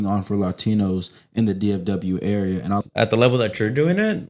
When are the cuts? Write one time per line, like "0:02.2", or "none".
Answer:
0:02.8